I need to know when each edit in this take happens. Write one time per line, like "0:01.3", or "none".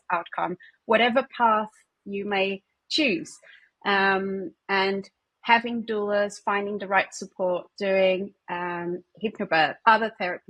none

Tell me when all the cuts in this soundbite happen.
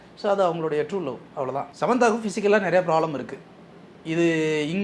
0:01.7

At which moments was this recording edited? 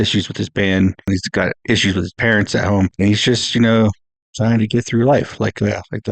0:01.1
0:02.9

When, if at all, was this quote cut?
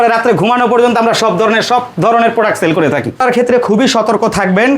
0:03.2

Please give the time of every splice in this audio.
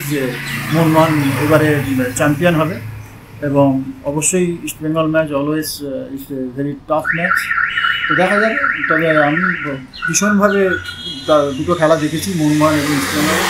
none

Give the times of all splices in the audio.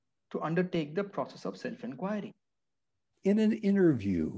0:03.0

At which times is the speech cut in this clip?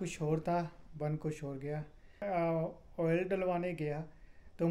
0:02.2

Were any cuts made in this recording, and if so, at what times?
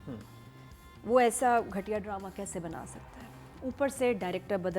none

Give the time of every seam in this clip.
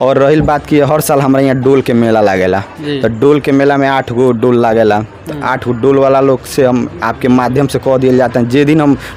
none

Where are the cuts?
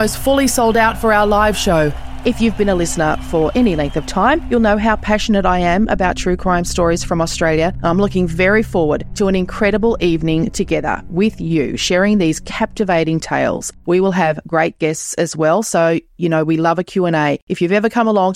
none

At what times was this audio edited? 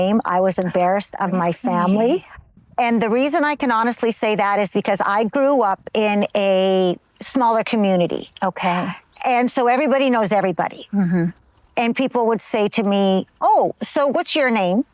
0:02.6

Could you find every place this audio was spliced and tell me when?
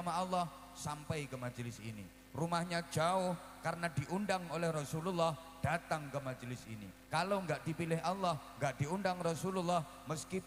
none

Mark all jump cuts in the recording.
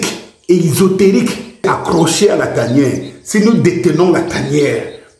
0:01.6

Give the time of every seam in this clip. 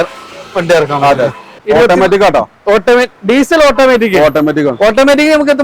0:01.5

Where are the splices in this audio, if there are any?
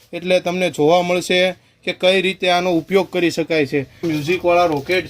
0:04.0

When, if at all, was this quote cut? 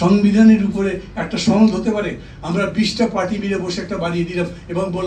none

